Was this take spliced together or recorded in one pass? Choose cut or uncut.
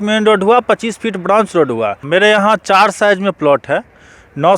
cut